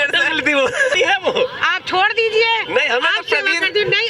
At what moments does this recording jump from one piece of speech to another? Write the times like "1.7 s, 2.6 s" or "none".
0.9 s